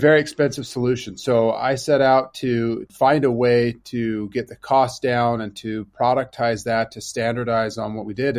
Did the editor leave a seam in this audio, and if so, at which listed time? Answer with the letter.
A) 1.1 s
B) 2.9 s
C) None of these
B